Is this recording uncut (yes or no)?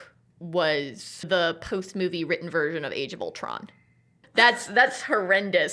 no